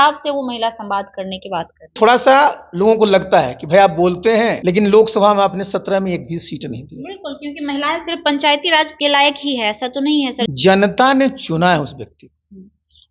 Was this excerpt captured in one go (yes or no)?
no